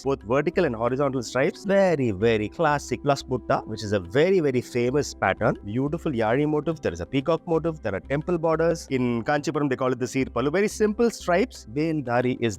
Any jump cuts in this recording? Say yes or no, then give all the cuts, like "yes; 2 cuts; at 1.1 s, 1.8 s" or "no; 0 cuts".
yes; 4 cuts; at 1.6 s, 5.6 s, 8.9 s, 11.6 s